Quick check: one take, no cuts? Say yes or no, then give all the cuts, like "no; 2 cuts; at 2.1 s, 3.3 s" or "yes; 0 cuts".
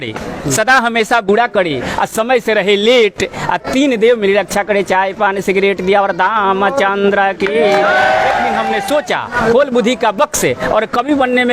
no; 1 cut; at 8.6 s